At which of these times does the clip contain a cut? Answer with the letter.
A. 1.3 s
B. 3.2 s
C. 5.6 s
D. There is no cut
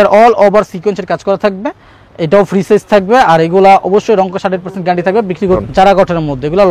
C